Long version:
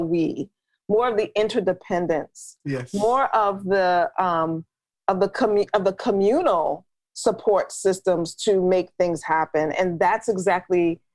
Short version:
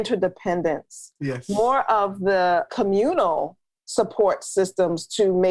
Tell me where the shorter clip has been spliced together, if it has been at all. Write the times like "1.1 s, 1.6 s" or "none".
2.7 s